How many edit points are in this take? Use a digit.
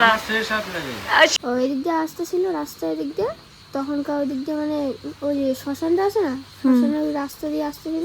1